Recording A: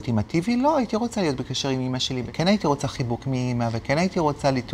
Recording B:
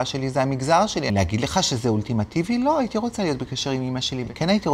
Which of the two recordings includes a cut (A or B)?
B